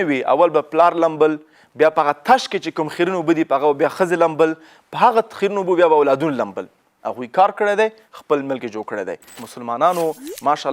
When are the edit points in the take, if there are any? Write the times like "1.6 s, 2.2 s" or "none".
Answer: 9.3 s